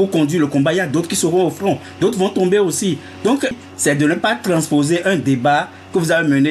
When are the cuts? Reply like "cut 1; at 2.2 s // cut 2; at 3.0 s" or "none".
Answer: cut 1; at 3.7 s